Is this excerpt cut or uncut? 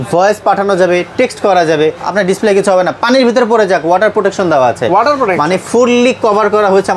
cut